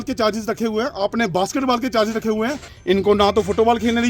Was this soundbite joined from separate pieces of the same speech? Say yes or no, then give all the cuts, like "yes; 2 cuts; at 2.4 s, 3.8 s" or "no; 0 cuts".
yes; 1 cut; at 2.7 s